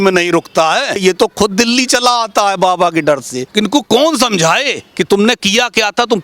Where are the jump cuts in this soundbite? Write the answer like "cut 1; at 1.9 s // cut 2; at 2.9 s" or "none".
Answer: cut 1; at 1.0 s // cut 2; at 3.4 s